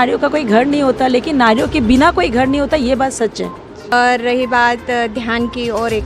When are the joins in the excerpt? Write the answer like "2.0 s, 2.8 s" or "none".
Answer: 3.9 s